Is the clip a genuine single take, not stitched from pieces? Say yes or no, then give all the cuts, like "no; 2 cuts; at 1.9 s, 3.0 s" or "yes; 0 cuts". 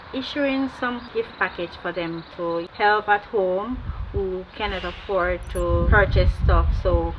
no; 1 cut; at 2.7 s